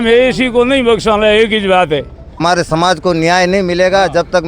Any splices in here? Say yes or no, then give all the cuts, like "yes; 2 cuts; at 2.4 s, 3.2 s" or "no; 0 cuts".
yes; 1 cut; at 2.2 s